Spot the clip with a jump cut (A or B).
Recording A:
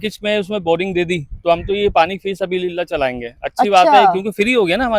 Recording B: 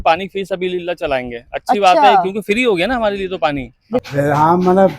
B